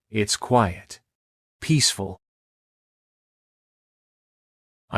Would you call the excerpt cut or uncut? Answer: uncut